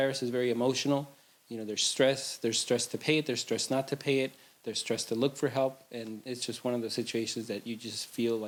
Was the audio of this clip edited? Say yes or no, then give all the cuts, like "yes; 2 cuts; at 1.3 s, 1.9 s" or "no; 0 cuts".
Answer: no; 0 cuts